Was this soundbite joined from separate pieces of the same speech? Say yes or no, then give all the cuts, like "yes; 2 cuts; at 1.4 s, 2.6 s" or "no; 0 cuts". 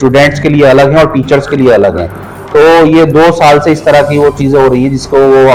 no; 0 cuts